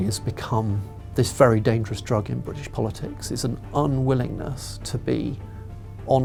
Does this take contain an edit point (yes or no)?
no